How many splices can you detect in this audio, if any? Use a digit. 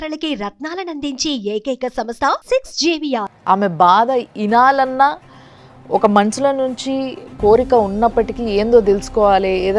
1